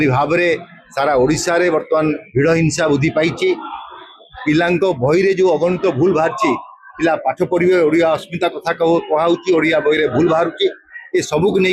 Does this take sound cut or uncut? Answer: uncut